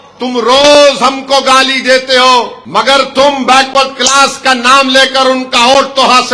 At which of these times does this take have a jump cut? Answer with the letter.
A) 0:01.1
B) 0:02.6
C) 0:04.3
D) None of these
B